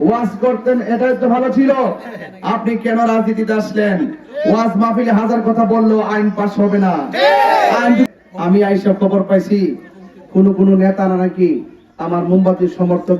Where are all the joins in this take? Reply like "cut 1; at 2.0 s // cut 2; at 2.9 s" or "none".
cut 1; at 8.1 s